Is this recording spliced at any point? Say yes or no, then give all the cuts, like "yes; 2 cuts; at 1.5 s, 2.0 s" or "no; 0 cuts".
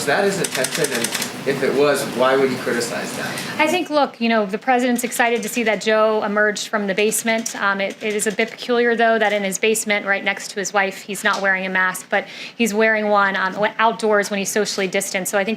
no; 0 cuts